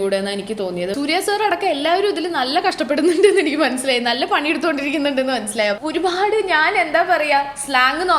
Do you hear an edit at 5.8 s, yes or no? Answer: yes